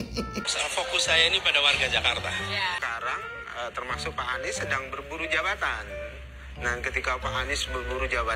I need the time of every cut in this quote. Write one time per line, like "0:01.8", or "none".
0:02.8

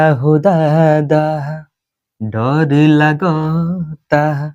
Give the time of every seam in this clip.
none

